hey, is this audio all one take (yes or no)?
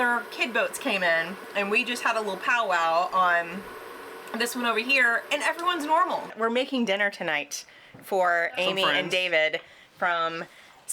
no